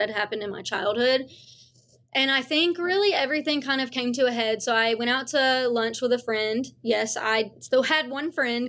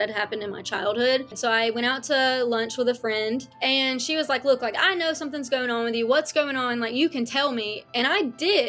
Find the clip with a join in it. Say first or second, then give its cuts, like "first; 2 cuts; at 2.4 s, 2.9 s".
second; 2 cuts; at 1.4 s, 3.5 s